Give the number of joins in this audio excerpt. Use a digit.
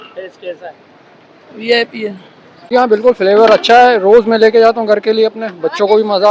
1